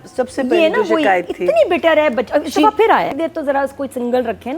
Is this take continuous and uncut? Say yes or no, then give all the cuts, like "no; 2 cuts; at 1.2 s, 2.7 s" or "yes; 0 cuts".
no; 1 cut; at 3.1 s